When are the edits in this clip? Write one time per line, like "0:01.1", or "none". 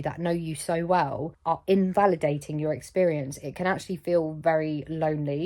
0:01.3